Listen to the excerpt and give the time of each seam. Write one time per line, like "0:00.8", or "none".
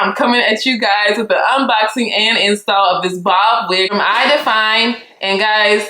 0:03.9

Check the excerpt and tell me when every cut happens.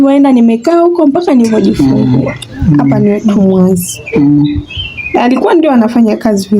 0:03.0

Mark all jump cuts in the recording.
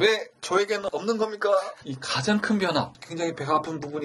0:01.8

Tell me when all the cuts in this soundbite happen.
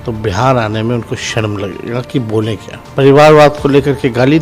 0:02.7

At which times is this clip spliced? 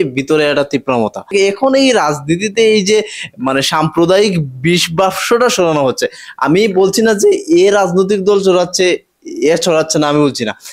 0:01.3

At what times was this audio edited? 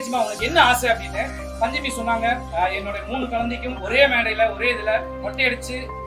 0:02.5
0:03.8
0:05.2

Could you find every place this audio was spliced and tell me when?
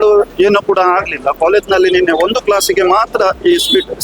none

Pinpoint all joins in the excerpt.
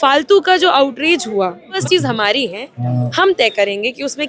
0:01.8

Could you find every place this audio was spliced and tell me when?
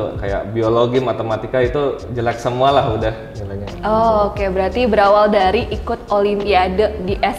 none

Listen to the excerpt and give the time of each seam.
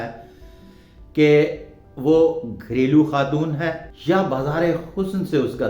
0:03.9

